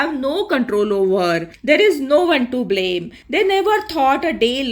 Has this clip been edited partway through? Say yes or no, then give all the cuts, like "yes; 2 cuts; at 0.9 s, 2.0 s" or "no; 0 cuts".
yes; 1 cut; at 3.2 s